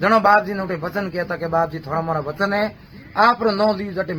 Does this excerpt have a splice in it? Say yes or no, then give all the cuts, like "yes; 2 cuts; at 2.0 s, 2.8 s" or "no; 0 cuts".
no; 0 cuts